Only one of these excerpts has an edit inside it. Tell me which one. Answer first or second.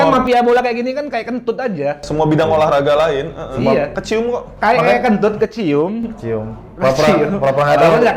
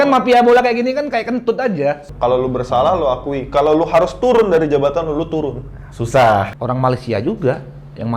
second